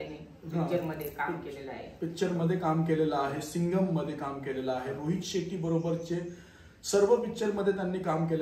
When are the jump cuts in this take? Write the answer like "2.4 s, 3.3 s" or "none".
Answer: none